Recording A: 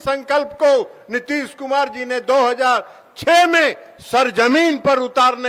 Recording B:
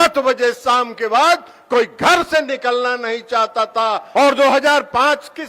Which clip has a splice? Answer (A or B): B